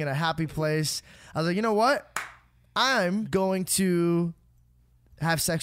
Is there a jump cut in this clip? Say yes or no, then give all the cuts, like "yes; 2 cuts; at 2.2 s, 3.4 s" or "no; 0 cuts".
yes; 1 cut; at 3.3 s